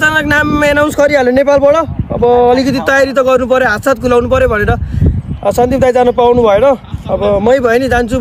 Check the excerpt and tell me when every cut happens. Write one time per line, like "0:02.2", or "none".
none